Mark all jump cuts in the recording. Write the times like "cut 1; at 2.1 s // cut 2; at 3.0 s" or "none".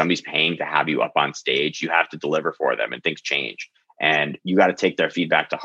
none